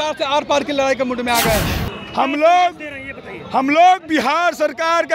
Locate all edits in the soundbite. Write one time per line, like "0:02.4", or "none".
0:01.7